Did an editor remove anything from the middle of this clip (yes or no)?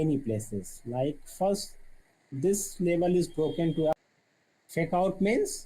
yes